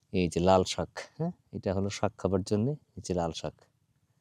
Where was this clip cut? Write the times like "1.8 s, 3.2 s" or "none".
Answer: none